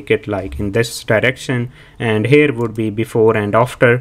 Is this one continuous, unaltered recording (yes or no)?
yes